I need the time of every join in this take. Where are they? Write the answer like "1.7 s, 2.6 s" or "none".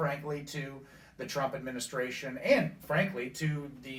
none